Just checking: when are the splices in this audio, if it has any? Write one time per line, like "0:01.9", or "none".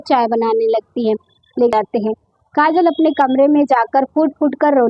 0:01.7